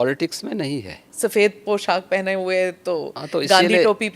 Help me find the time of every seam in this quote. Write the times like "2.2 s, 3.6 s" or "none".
1.1 s